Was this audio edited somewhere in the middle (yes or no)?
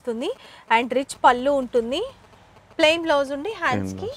no